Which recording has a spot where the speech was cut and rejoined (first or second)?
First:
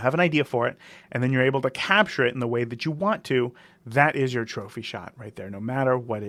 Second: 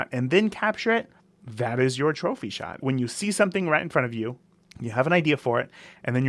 second